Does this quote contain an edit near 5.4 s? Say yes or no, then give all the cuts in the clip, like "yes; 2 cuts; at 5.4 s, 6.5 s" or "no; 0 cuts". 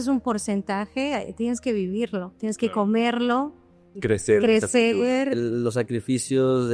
yes; 2 cuts; at 3.9 s, 5.4 s